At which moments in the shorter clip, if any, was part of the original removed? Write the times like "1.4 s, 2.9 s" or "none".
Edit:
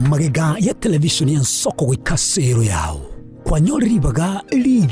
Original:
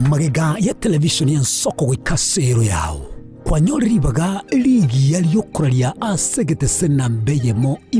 none